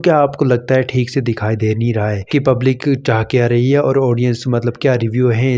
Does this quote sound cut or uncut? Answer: uncut